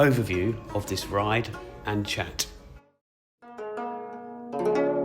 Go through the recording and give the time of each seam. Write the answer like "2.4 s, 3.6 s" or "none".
2.9 s